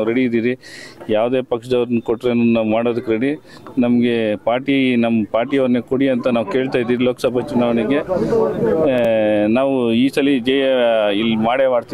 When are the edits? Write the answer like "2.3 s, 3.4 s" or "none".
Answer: none